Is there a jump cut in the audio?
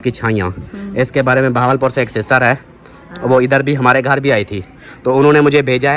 no; 0 cuts

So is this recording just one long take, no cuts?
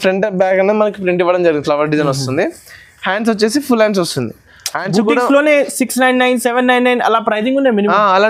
yes; 0 cuts

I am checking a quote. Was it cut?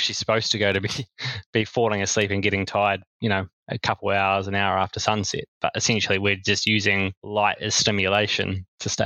yes; 1 cut; at 7.2 s

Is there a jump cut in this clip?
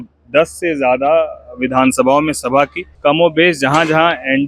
yes; 1 cut; at 2.8 s

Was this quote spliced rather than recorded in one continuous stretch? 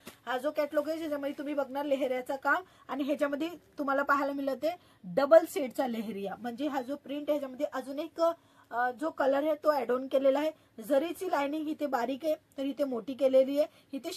no; 0 cuts

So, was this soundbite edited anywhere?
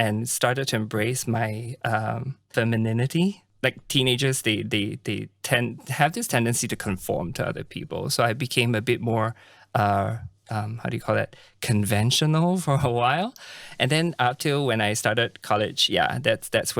yes; 2 cuts; at 2.5 s, 3.5 s

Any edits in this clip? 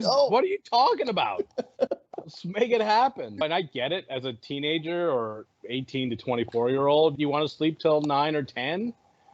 yes; 2 cuts; at 5.5 s, 7.1 s

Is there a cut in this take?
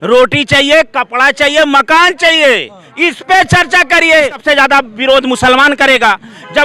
yes; 1 cut; at 4.4 s

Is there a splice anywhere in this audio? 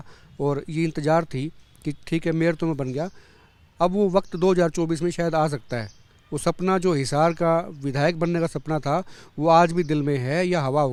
no; 0 cuts

